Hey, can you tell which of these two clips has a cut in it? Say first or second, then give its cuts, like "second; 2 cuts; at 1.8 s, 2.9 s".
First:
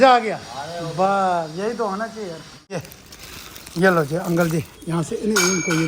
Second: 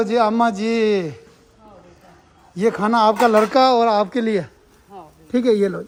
first; 1 cut; at 2.8 s